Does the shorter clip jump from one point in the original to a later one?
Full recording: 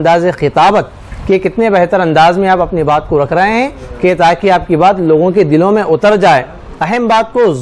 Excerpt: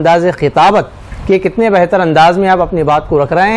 no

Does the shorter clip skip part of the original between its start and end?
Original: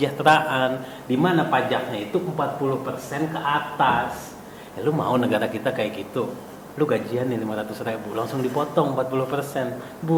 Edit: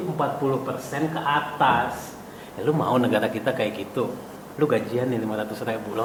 no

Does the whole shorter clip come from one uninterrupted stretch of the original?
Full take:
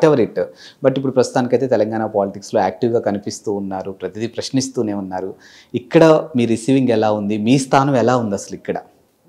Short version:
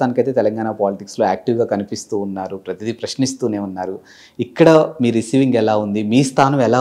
yes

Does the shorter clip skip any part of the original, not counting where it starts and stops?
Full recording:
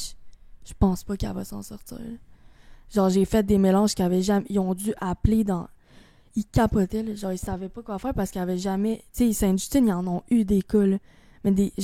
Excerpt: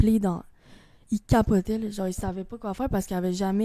no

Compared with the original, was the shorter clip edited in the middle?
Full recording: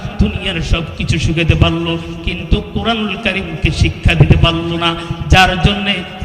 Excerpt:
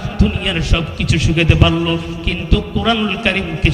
no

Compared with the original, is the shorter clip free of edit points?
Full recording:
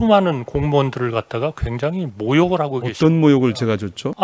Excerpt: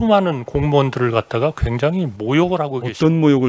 yes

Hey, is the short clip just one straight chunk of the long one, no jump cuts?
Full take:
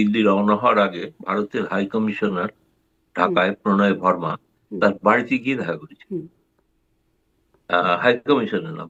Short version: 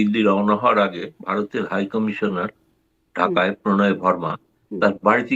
yes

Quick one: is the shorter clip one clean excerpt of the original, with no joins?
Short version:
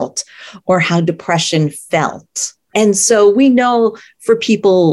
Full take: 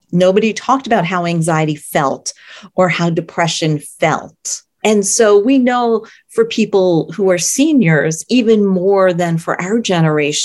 yes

